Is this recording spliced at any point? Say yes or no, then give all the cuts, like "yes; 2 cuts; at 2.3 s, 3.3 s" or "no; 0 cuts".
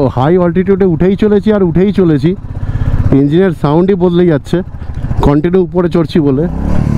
no; 0 cuts